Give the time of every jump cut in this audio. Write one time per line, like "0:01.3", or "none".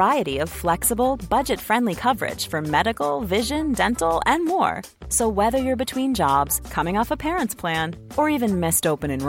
none